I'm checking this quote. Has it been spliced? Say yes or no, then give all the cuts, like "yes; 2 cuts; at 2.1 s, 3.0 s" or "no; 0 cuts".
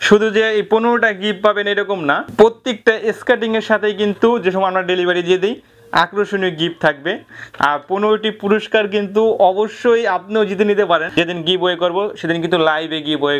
yes; 3 cuts; at 2.3 s, 7.3 s, 11.1 s